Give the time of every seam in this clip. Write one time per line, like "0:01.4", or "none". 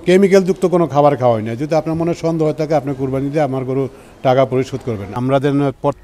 0:05.1